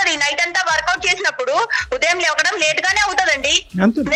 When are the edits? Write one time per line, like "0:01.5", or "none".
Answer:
none

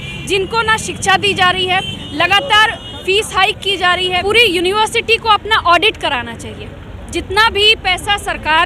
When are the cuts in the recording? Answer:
0:04.1

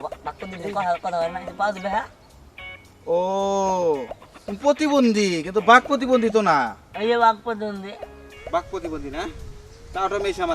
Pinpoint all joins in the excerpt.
0:08.4

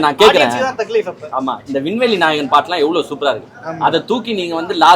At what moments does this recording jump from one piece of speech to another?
none

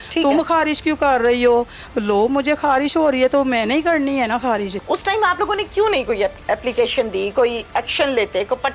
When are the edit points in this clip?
0:04.8

